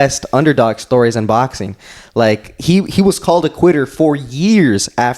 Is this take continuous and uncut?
yes; 0 cuts

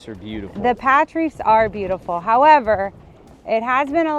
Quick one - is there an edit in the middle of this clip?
no; 0 cuts

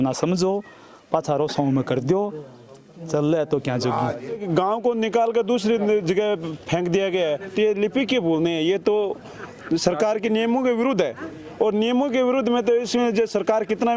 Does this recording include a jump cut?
yes; 1 cut; at 4.4 s

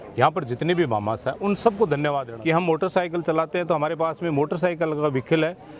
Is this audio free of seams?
no; 1 cut; at 2.3 s

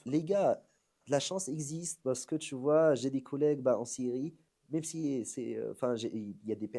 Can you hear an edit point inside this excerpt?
no; 0 cuts

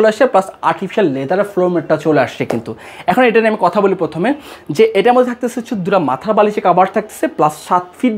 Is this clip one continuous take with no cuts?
yes; 0 cuts

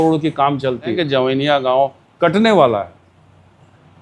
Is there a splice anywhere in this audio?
yes; 1 cut; at 0.9 s

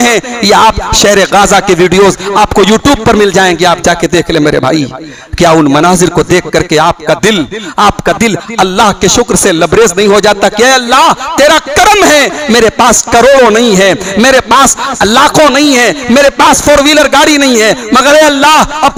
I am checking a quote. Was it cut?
no; 0 cuts

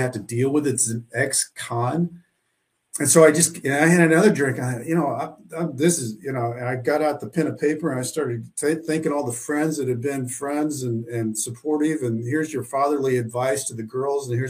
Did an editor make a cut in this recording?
no; 0 cuts

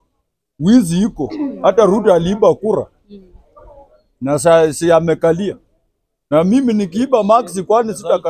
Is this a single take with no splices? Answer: yes; 0 cuts

